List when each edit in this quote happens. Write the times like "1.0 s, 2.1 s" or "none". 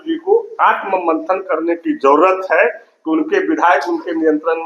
none